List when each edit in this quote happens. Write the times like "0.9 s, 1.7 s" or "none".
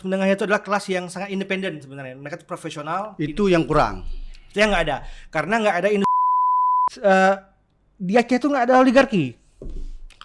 6.3 s